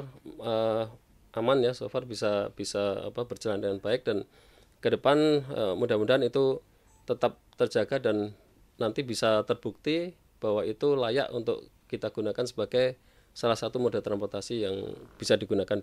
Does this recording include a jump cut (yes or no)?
no